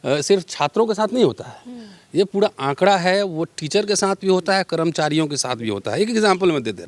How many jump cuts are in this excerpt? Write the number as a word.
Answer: zero